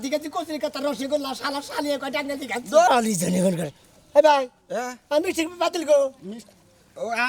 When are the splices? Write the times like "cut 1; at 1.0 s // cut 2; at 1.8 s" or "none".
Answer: cut 1; at 2.9 s

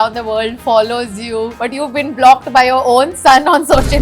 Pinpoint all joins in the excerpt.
cut 1; at 1.6 s

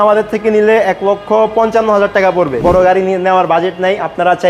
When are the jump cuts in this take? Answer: cut 1; at 2.6 s

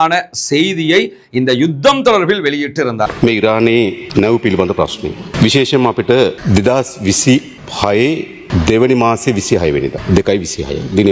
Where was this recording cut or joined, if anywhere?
cut 1; at 3.1 s // cut 2; at 4.0 s // cut 3; at 5.3 s // cut 4; at 6.4 s // cut 5; at 7.6 s // cut 6; at 8.4 s // cut 7; at 10.0 s

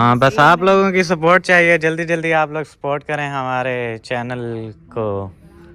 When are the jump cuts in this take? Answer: none

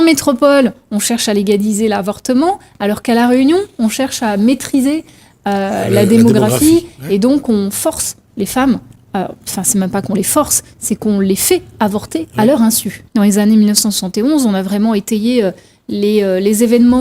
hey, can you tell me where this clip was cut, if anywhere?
cut 1; at 12.9 s

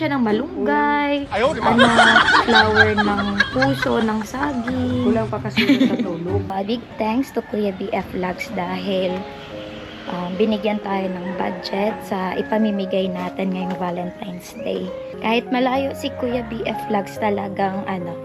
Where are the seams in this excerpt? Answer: cut 1; at 6.5 s // cut 2; at 15.1 s

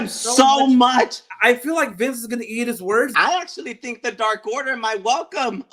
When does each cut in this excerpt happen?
cut 1; at 1.2 s // cut 2; at 3.1 s

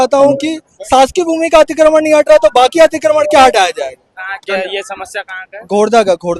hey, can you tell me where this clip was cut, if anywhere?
none

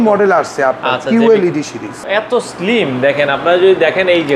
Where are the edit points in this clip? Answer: cut 1; at 1.9 s

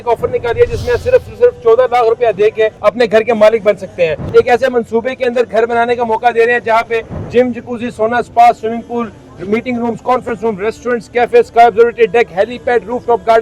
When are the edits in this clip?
cut 1; at 2.8 s // cut 2; at 4.2 s

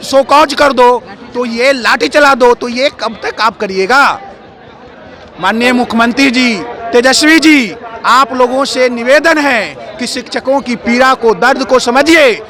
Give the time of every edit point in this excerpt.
none

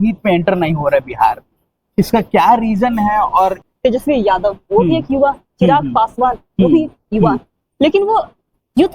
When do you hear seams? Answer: cut 1; at 3.7 s

